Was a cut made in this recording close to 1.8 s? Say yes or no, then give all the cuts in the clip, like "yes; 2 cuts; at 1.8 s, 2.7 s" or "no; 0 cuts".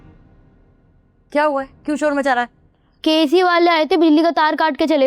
no; 0 cuts